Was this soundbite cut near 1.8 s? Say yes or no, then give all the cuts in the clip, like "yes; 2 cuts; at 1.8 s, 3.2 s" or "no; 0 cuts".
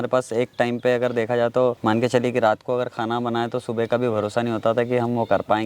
yes; 1 cut; at 1.8 s